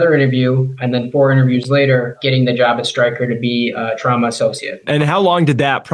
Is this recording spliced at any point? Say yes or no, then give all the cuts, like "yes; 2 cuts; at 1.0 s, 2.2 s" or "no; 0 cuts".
yes; 2 cuts; at 2.2 s, 4.9 s